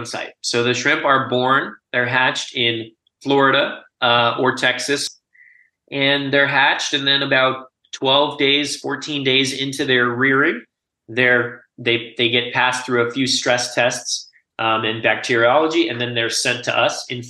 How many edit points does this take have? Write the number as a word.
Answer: one